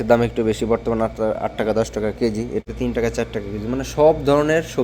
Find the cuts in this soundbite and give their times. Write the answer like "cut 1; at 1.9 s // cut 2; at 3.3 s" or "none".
cut 1; at 2.6 s